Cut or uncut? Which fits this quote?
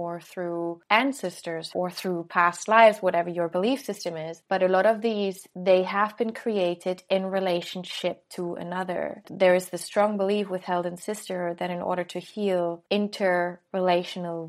cut